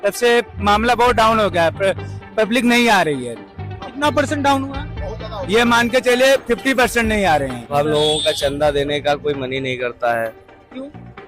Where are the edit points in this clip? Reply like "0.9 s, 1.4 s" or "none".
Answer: none